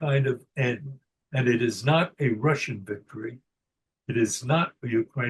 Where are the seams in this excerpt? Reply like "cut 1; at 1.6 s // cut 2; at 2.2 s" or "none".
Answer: none